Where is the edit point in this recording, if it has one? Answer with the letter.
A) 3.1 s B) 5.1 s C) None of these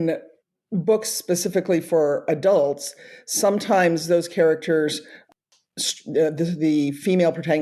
B